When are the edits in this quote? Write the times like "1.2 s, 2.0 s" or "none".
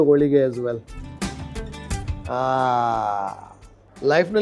none